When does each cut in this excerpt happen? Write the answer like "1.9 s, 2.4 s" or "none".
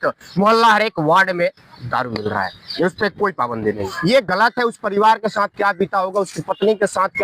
3.9 s